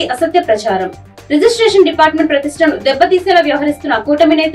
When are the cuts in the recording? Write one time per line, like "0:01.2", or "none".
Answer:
none